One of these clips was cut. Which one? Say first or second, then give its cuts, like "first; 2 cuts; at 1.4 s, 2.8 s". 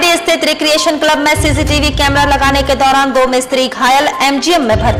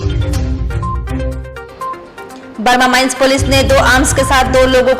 second; 1 cut; at 1.4 s